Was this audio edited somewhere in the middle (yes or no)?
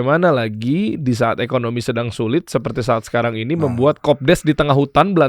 no